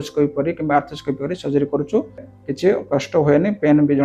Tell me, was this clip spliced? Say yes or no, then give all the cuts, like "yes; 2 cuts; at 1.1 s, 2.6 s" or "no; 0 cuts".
yes; 1 cut; at 2.3 s